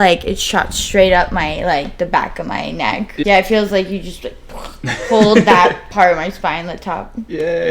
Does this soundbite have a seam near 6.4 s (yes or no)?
no